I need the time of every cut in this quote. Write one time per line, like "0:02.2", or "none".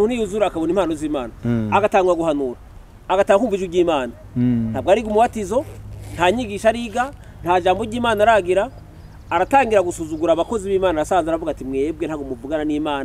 none